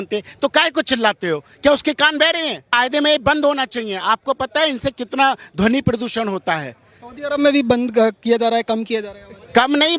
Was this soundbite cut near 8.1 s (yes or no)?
no